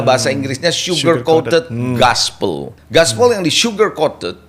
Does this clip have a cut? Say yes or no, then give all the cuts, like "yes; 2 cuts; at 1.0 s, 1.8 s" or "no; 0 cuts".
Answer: yes; 1 cut; at 2.7 s